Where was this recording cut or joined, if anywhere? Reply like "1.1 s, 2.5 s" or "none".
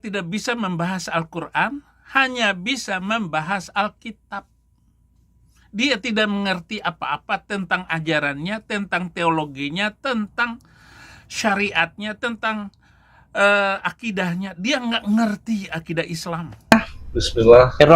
16.7 s

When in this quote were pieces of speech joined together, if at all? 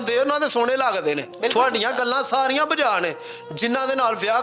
1.3 s

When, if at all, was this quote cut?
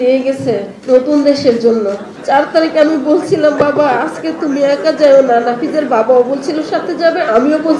2.1 s

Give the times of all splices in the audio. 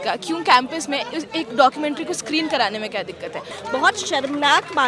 3.5 s

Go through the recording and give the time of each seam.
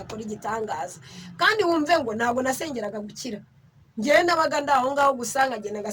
none

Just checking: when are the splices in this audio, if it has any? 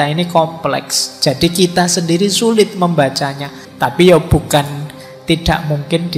3.6 s

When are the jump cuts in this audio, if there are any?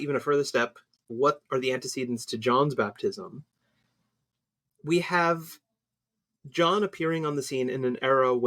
1.1 s

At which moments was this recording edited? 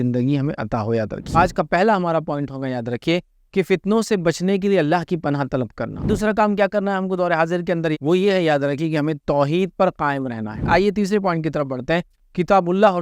1.3 s, 6.1 s, 7.9 s, 10.6 s, 12.1 s

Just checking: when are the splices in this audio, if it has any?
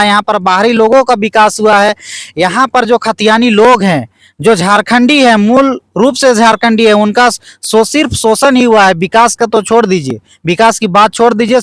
none

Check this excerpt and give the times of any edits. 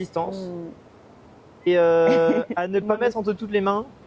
1.7 s

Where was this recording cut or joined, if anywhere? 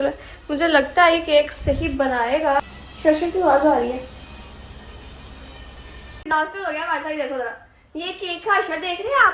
2.6 s, 6.1 s

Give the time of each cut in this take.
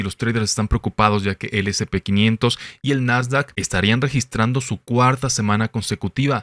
none

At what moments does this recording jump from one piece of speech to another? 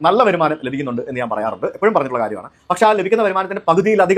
none

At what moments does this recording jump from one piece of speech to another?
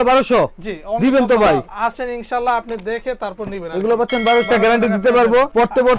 1.7 s, 4.5 s

